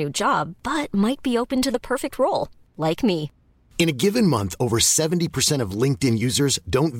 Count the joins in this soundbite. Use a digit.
0